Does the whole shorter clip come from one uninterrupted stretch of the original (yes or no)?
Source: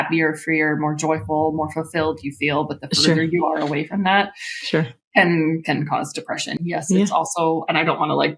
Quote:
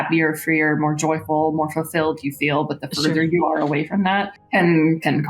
no